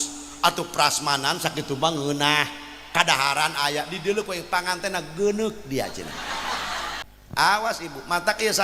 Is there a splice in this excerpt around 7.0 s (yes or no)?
yes